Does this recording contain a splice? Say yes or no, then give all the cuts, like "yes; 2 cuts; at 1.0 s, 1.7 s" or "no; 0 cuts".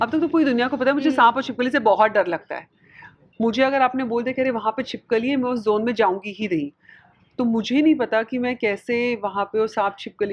no; 0 cuts